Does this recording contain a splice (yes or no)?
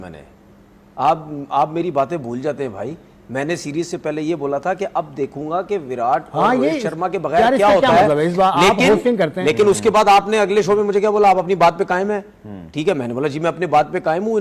no